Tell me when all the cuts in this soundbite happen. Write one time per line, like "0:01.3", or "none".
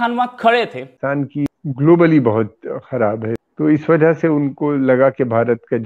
0:01.4
0:03.4